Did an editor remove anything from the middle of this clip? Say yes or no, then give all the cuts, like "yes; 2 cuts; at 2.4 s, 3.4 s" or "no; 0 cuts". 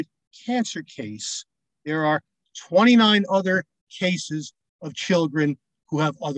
no; 0 cuts